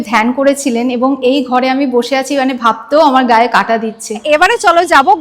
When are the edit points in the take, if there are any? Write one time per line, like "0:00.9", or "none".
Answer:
0:04.2